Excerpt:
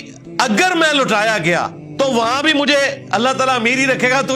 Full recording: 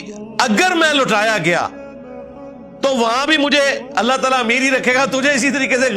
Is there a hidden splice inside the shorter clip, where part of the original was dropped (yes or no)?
yes